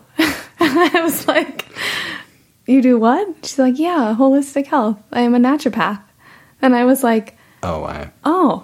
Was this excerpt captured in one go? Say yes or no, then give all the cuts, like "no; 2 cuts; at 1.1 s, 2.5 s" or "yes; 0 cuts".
yes; 0 cuts